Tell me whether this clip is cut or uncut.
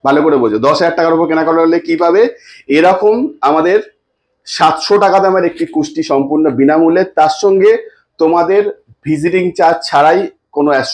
uncut